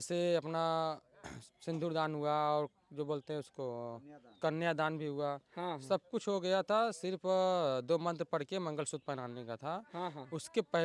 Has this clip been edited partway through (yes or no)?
no